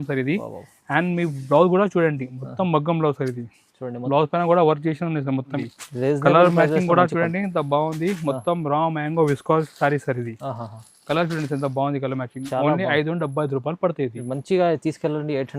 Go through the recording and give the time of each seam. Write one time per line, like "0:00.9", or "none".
0:05.5